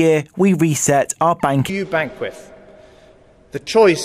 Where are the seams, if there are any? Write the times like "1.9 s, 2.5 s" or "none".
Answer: none